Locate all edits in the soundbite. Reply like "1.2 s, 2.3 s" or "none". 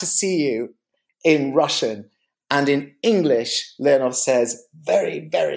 none